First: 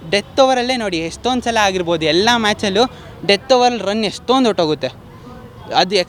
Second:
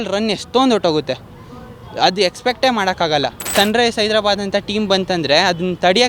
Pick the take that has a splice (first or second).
second